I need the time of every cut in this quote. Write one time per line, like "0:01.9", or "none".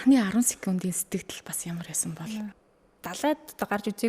0:02.6